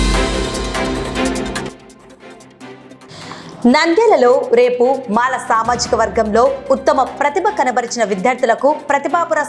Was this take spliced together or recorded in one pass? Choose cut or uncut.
cut